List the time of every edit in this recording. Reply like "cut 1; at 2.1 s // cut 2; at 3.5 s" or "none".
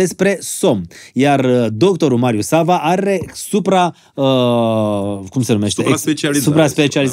none